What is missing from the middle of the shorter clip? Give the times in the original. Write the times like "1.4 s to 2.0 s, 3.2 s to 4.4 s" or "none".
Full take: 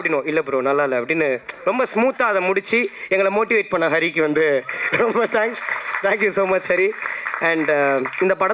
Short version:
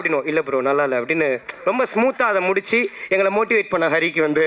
none